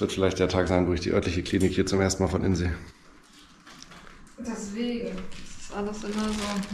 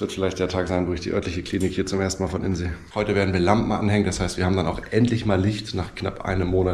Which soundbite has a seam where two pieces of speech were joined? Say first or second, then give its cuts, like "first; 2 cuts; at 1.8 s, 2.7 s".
second; 1 cut; at 2.8 s